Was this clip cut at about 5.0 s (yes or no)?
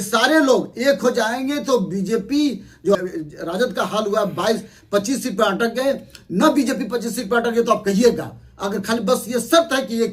no